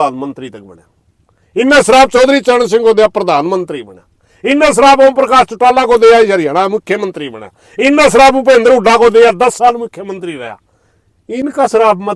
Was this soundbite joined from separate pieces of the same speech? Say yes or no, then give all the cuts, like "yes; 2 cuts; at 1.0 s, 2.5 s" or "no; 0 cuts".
no; 0 cuts